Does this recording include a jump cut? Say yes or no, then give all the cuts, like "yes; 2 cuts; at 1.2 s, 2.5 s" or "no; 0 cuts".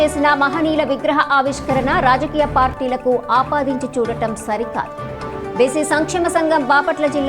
no; 0 cuts